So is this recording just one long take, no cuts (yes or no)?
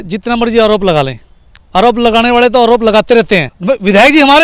no